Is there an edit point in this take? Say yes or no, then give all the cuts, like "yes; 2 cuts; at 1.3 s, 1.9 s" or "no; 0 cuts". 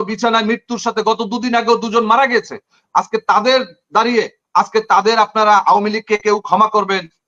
no; 0 cuts